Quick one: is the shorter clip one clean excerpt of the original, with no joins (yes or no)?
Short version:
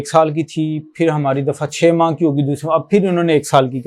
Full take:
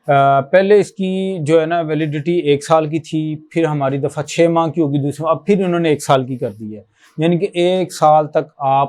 yes